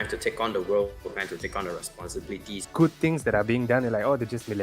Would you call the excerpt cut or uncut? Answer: cut